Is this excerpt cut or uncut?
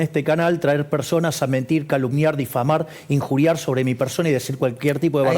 uncut